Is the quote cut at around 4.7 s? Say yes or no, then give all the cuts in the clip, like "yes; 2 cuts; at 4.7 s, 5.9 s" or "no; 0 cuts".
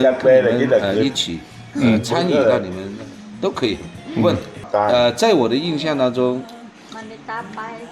yes; 1 cut; at 4.7 s